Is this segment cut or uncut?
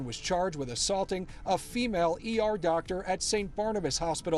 uncut